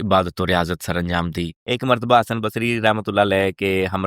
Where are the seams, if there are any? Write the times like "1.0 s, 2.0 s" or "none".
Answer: 1.7 s